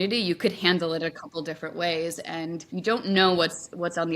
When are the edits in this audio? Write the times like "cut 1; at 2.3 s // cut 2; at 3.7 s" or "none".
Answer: cut 1; at 2.6 s